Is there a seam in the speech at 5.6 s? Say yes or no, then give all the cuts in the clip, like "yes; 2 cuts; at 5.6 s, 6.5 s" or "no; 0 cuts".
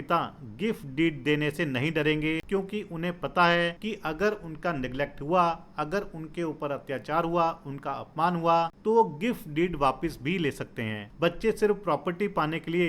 no; 4 cuts; at 2.4 s, 3.8 s, 8.8 s, 11.0 s